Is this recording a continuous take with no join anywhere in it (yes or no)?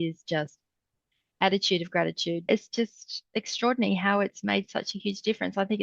no